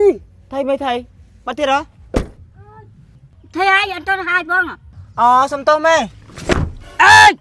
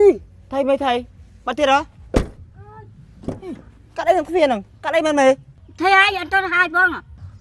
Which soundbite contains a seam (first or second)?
first